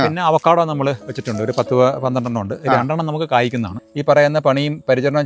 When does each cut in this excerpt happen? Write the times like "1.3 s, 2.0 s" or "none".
3.8 s